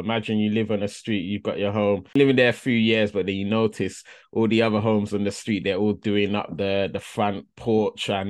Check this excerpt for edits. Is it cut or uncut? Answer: cut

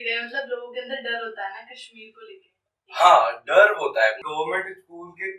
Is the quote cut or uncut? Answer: cut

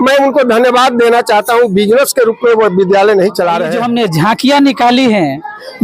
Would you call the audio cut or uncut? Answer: cut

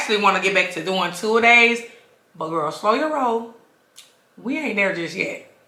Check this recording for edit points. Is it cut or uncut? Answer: uncut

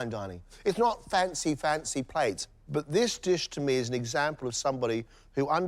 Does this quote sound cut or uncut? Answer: uncut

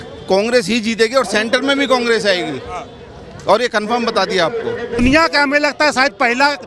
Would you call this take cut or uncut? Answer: cut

